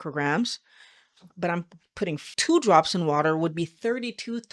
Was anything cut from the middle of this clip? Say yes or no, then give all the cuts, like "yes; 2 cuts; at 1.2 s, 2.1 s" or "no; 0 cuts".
yes; 1 cut; at 2.3 s